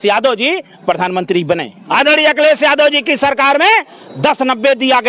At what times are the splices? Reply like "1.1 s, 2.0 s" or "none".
1.8 s